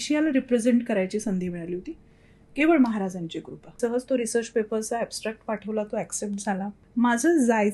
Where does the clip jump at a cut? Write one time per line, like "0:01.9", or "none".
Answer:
0:03.6
0:06.8